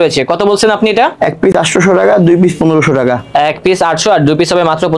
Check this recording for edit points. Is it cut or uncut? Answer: uncut